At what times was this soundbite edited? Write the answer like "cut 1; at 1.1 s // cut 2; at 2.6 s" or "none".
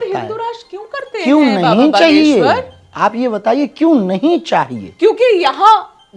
none